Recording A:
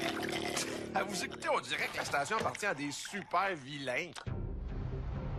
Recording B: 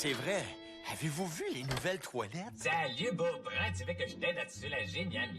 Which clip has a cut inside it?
B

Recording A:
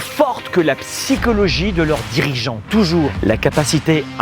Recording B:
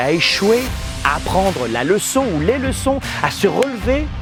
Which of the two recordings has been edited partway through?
A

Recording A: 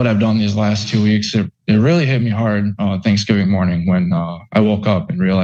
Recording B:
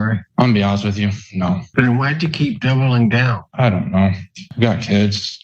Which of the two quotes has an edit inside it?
B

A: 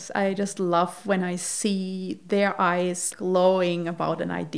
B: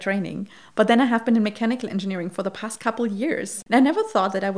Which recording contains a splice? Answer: A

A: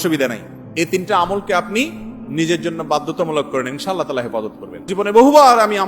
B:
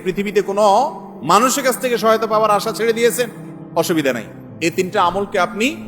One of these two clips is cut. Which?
A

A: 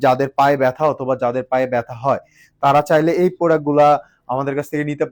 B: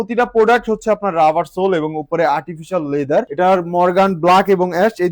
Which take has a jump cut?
B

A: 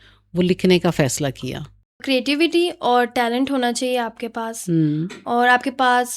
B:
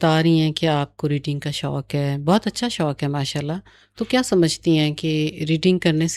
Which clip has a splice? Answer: A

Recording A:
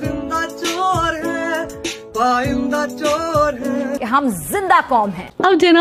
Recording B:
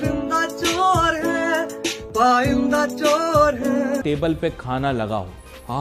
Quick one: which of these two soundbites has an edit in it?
B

